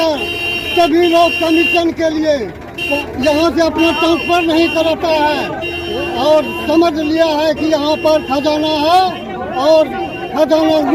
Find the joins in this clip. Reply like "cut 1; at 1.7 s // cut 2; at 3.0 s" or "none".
none